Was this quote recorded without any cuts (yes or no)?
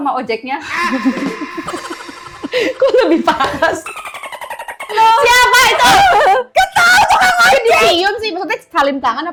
yes